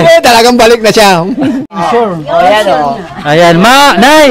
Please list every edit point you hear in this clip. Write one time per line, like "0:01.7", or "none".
0:01.8